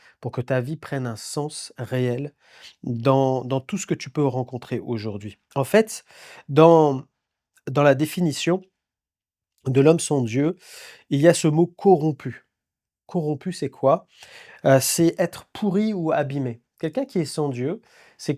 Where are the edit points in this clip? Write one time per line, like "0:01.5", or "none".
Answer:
none